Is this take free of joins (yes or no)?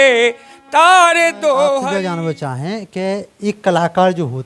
no